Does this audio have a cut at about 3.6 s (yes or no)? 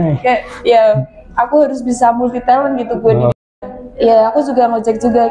yes